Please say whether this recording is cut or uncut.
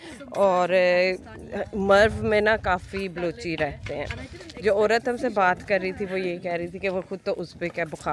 uncut